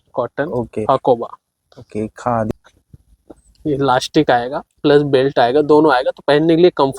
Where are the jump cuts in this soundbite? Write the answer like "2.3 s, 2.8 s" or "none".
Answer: 2.5 s